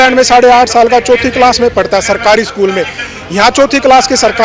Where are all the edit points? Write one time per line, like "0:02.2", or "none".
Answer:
none